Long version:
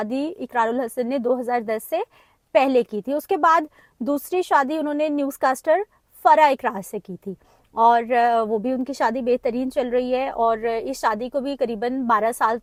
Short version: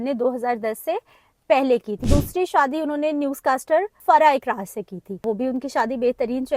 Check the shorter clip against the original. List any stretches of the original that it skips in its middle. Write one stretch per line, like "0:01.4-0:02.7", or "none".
0:03.0-0:03.9
0:05.9-0:06.1
0:07.4-0:08.5